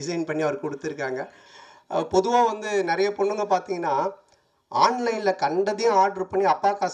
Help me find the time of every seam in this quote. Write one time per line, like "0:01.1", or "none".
0:01.4